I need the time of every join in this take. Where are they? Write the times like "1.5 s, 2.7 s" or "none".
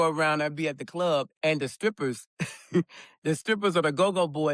1.3 s